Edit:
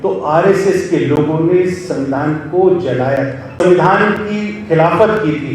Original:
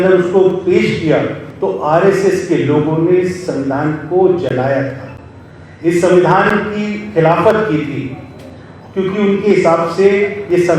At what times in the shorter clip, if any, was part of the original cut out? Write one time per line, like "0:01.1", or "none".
0:03.6